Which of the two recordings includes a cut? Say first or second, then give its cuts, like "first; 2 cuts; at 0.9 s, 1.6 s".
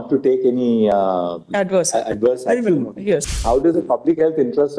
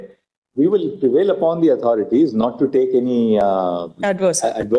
first; 1 cut; at 3.3 s